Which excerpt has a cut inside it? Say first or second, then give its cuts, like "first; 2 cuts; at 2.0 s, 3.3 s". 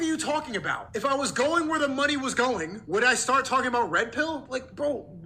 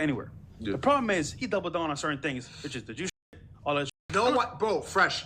second; 1 cut; at 1.4 s